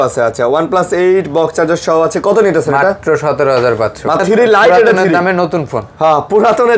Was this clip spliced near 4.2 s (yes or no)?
yes